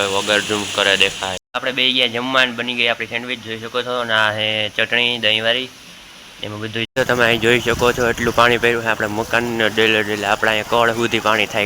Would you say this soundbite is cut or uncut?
cut